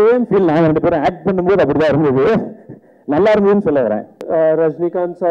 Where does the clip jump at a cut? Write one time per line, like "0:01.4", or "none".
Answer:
0:04.2